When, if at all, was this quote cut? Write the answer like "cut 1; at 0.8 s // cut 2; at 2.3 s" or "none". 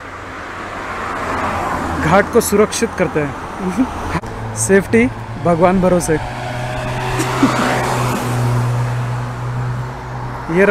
cut 1; at 4.2 s